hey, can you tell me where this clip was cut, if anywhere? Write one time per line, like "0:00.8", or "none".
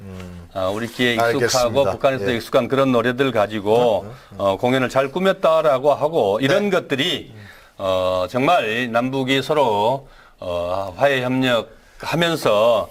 none